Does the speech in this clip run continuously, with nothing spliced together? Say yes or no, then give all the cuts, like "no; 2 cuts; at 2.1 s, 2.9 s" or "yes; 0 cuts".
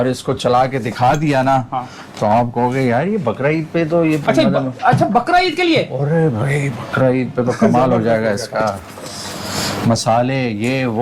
yes; 0 cuts